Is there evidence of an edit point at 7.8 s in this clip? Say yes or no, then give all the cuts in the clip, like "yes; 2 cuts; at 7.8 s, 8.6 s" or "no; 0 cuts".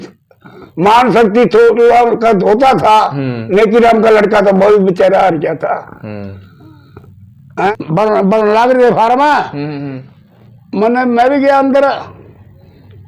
yes; 1 cut; at 7.8 s